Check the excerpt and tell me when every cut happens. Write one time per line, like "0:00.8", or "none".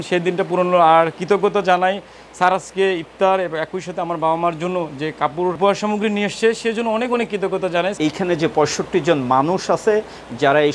0:05.6
0:08.0